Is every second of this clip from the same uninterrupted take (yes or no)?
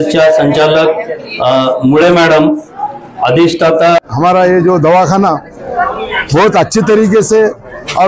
no